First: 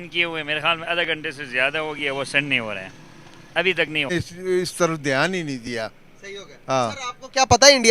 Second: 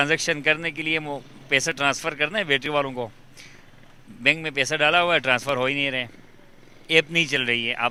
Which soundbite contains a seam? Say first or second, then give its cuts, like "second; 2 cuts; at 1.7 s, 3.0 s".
first; 1 cut; at 4.1 s